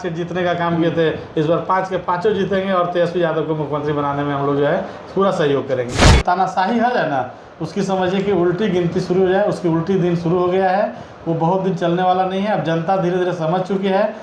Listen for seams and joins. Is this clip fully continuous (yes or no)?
no